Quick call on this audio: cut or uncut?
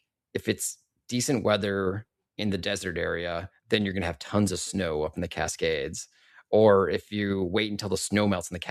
uncut